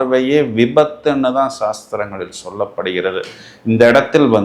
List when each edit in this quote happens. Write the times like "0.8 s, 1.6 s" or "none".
none